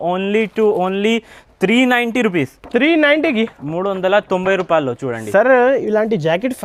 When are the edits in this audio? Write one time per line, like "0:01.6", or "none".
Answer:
none